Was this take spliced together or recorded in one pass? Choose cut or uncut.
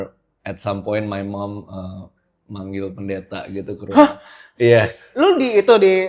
uncut